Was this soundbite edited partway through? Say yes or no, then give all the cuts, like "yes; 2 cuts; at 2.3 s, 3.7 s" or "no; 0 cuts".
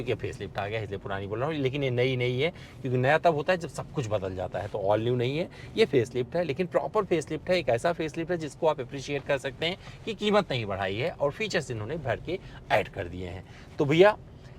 no; 0 cuts